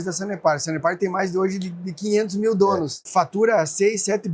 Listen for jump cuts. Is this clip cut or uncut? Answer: cut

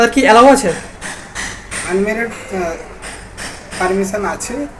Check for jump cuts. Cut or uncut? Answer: uncut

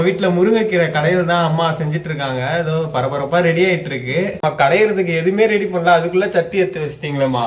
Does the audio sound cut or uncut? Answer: uncut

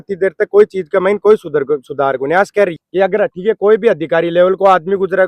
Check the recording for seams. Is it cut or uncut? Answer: cut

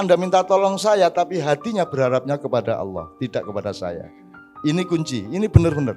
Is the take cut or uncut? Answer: uncut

